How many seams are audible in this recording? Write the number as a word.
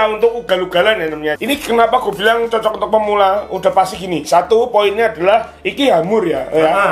one